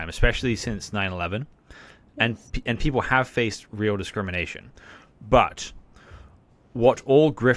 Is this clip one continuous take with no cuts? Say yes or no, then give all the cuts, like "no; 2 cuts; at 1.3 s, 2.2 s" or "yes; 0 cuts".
yes; 0 cuts